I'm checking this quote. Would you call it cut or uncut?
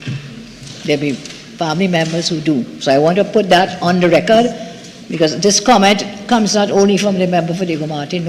uncut